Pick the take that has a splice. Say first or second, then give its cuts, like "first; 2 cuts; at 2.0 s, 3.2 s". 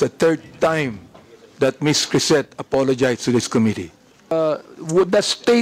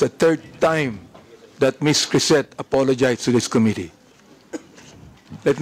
first; 1 cut; at 4.3 s